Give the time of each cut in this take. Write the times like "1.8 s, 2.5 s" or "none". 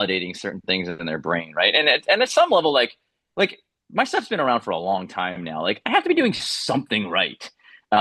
none

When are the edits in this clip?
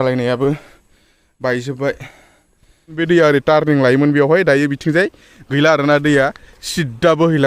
3.0 s

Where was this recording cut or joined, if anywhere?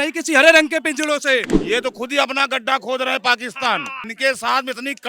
1.6 s, 4.0 s

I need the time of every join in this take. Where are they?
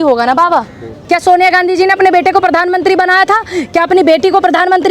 0.9 s

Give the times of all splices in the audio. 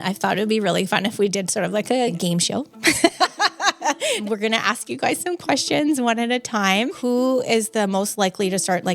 2.1 s, 4.3 s, 7.0 s

